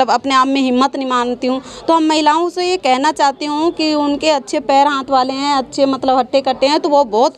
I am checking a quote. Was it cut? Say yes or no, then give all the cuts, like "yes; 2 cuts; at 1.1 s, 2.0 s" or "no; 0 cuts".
no; 0 cuts